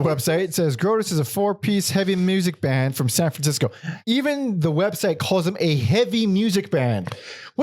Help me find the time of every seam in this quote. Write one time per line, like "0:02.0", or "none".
0:03.9

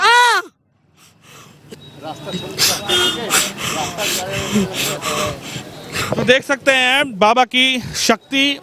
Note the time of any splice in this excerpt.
none

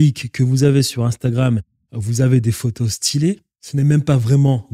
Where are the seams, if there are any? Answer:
0:03.5

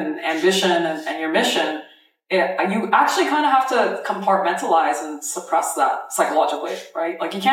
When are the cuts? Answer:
none

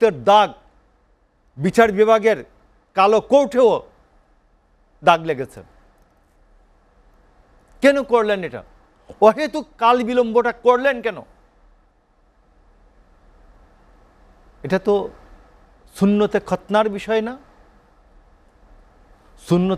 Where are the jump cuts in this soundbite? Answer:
none

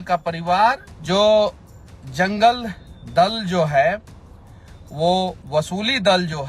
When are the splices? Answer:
0:00.9

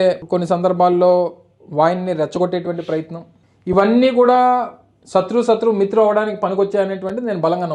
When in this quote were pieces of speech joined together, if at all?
none

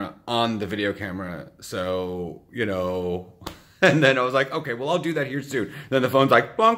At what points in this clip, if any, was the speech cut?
none

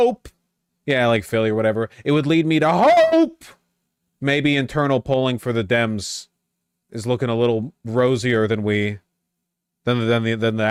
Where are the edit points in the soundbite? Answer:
none

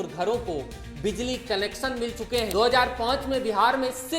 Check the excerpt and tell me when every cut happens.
0:02.5

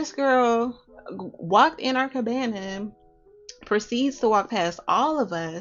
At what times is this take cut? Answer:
none

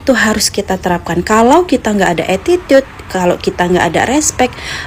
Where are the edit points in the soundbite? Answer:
none

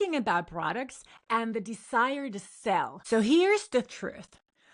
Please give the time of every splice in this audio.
0:03.0

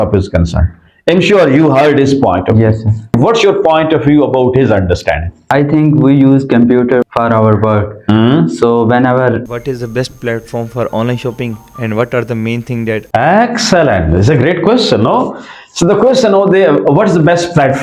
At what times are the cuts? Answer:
0:05.3
0:07.1
0:09.4
0:13.0

